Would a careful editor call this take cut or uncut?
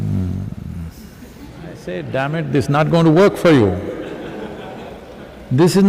cut